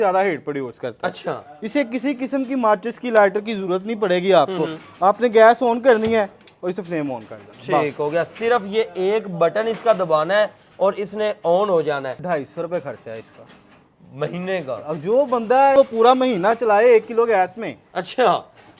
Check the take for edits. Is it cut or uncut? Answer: cut